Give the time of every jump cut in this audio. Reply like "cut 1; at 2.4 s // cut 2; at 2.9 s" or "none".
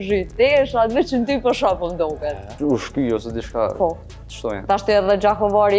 cut 1; at 2.5 s